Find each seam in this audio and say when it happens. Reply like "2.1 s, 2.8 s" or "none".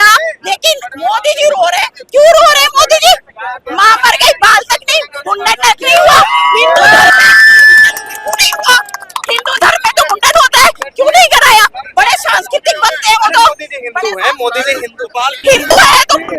none